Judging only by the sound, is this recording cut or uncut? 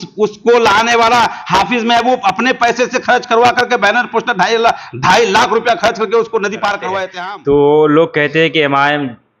cut